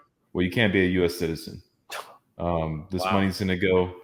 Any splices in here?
no; 0 cuts

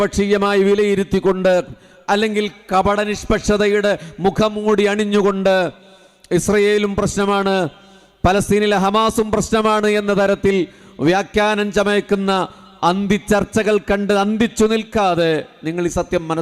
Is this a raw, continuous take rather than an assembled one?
yes; 0 cuts

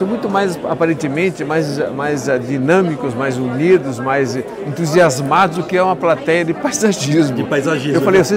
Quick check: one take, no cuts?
yes; 0 cuts

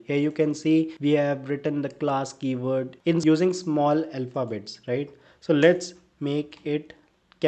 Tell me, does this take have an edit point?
yes; 1 cut; at 0.9 s

